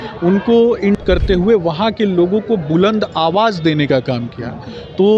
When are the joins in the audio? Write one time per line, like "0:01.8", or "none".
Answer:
0:01.0